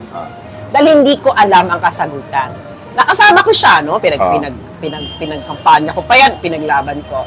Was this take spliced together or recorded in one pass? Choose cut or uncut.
uncut